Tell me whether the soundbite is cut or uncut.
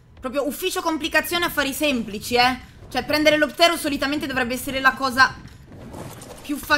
uncut